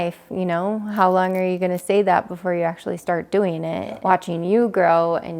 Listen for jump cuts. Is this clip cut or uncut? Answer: cut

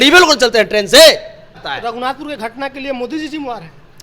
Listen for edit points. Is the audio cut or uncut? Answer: cut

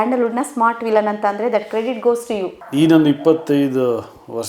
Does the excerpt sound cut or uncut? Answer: cut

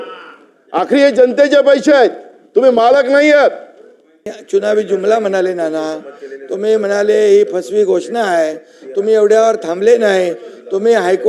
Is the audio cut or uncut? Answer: cut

